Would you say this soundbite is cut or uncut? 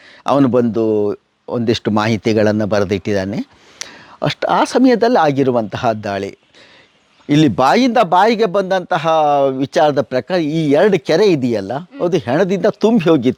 uncut